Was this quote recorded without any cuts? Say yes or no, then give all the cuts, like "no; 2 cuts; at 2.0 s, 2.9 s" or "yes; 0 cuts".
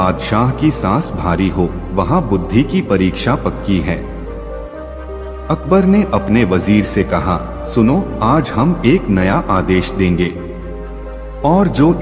no; 2 cuts; at 4.2 s, 5.5 s